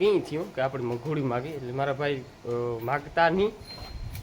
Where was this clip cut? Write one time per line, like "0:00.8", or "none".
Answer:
none